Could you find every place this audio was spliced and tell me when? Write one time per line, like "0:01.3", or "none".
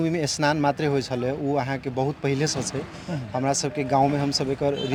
none